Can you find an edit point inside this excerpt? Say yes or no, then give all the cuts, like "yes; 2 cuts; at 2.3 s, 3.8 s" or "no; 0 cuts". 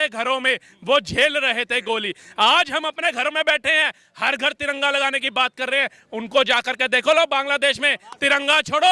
no; 0 cuts